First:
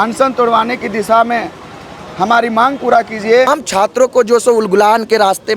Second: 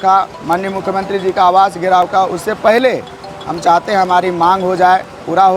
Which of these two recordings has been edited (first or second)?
first